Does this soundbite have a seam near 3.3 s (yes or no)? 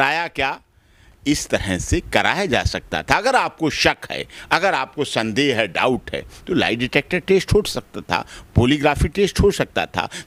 no